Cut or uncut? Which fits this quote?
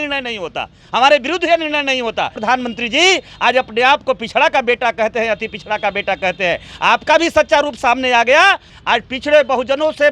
cut